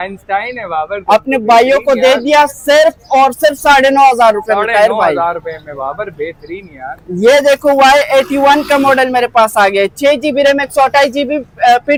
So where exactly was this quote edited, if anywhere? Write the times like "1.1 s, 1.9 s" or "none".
none